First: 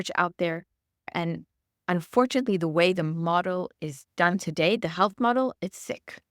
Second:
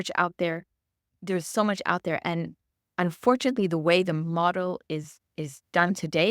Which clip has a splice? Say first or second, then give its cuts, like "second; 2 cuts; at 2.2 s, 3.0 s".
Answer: first; 2 cuts; at 1.1 s, 3.7 s